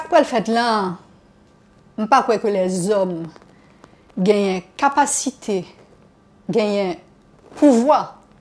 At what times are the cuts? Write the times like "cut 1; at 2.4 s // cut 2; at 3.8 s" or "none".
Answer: none